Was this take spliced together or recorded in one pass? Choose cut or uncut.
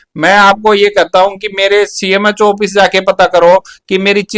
uncut